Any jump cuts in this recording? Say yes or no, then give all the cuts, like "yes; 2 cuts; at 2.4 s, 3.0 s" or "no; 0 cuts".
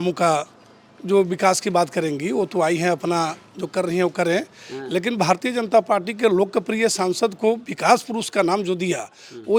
no; 0 cuts